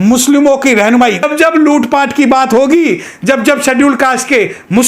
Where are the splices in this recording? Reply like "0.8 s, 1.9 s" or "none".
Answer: 1.2 s